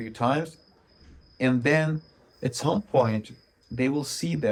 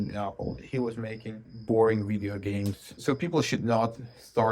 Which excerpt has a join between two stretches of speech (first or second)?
second